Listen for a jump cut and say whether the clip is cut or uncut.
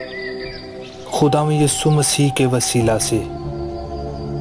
cut